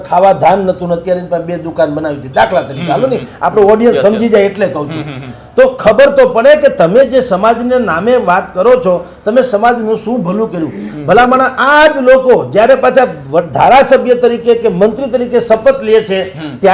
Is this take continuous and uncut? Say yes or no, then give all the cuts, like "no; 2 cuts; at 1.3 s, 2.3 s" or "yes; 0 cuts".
yes; 0 cuts